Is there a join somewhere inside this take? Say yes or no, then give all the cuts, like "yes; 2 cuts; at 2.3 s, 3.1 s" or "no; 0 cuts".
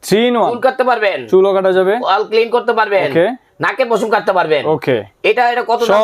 no; 0 cuts